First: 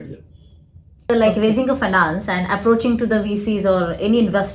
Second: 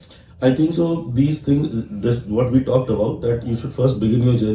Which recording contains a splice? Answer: first; 1 cut; at 1.1 s

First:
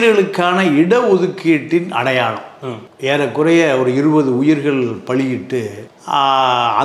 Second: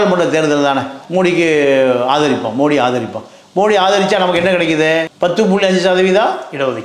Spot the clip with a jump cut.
second; 1 cut; at 1.0 s

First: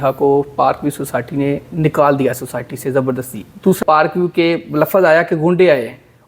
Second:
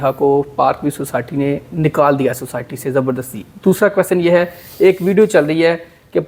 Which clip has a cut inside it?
first; 1 cut; at 3.8 s

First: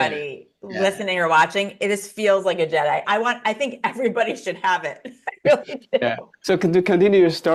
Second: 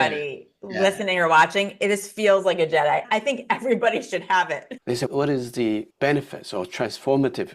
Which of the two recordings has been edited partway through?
second; 2 cuts; at 3.0 s, 4.8 s

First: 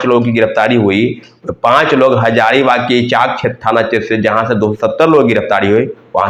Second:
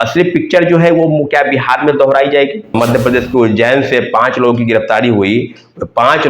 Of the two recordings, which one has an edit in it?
second; 1 cut; at 2.7 s

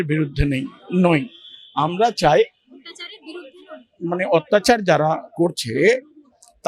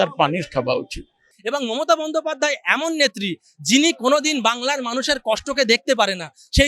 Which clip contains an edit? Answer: second; 1 cut; at 1.4 s

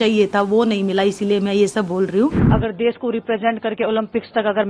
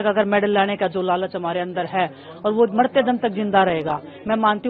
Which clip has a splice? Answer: first; 1 cut; at 2.4 s

